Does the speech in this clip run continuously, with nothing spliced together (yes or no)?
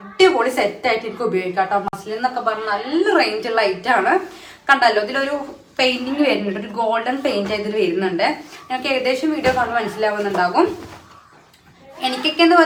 yes